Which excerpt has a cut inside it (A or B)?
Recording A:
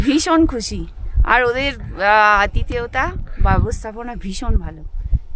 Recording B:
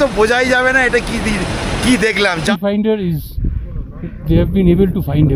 B